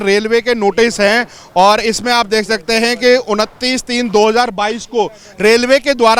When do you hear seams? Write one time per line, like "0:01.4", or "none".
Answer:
none